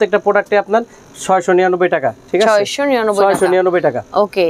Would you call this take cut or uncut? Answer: uncut